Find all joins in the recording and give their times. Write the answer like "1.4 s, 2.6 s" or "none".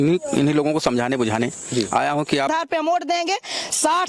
2.5 s